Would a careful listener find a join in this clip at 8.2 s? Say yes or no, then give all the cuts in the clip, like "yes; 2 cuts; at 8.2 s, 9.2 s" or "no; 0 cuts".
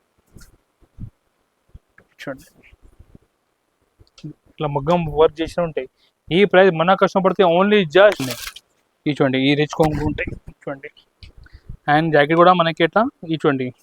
yes; 1 cut; at 8.2 s